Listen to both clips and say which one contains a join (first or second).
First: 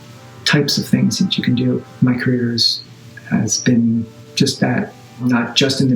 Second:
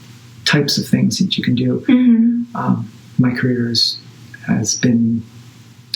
first